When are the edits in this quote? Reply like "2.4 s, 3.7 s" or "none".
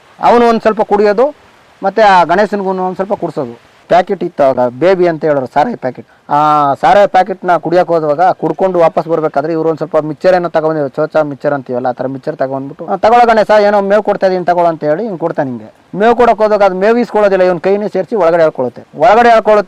3.8 s, 12.8 s